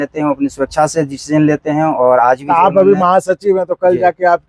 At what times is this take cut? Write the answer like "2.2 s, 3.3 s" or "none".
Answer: none